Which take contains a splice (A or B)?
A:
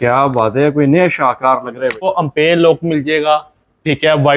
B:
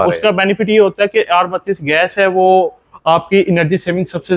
A